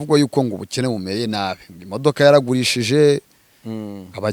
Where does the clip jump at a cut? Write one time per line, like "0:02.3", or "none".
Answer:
none